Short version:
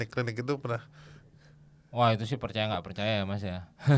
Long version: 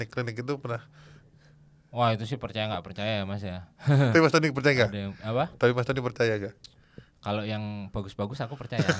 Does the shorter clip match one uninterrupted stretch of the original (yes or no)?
yes